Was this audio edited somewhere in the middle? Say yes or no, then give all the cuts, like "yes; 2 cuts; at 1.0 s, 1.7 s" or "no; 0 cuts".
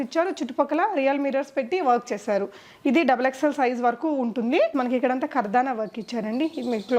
yes; 1 cut; at 4.7 s